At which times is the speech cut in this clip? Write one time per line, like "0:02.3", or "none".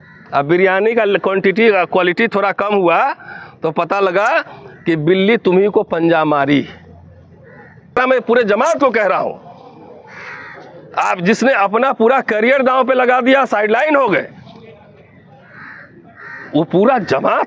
0:08.0